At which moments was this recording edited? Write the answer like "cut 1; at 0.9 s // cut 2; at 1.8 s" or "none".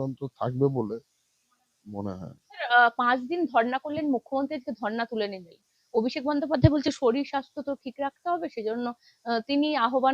none